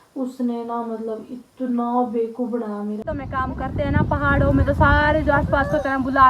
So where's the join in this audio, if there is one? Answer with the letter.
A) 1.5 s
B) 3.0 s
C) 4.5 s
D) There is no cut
B